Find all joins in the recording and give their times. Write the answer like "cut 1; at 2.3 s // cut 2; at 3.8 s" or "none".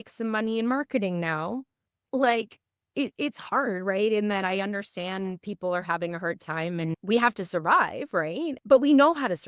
cut 1; at 6.9 s